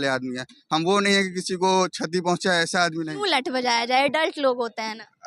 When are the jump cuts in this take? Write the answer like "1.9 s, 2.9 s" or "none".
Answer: 3.1 s